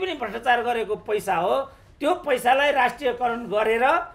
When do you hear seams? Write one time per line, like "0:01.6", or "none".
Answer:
none